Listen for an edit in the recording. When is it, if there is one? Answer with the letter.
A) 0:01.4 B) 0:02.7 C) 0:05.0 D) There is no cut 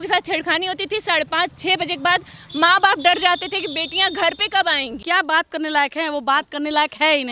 C